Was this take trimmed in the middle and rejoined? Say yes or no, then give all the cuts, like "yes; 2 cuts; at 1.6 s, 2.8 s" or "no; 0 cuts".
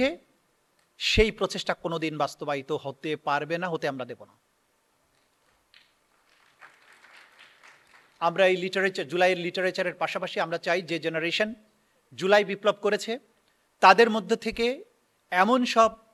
no; 0 cuts